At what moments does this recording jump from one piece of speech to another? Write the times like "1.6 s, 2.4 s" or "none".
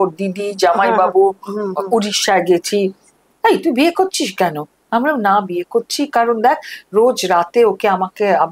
3.2 s